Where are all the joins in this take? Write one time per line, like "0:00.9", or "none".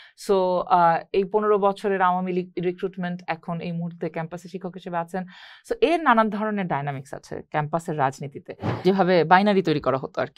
0:08.8